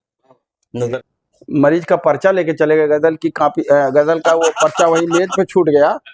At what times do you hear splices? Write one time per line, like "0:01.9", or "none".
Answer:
0:01.0